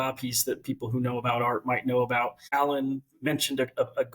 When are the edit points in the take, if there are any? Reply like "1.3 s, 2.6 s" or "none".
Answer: 2.5 s